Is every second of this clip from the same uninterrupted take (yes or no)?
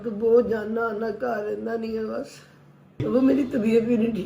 no